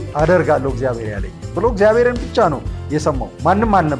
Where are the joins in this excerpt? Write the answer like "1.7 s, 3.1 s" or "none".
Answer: none

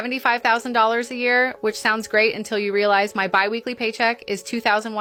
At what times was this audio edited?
none

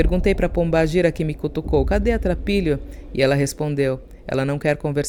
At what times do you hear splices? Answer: none

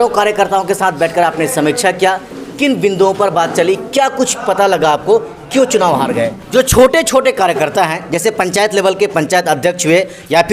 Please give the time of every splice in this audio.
6.4 s

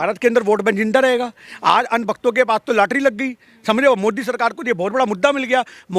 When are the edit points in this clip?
none

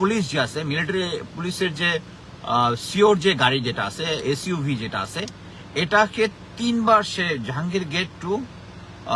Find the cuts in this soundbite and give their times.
none

